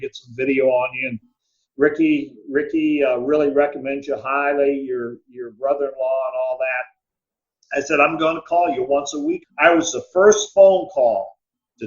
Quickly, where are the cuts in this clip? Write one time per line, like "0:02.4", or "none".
0:09.5